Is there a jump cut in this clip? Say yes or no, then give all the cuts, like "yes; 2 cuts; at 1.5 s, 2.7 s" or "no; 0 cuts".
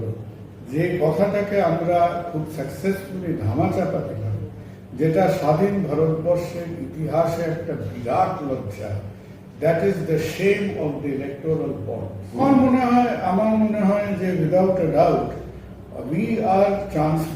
yes; 1 cut; at 12.4 s